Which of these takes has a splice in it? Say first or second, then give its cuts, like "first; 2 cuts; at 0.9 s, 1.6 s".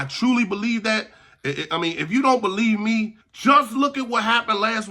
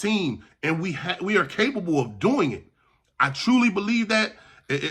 first; 1 cut; at 3.2 s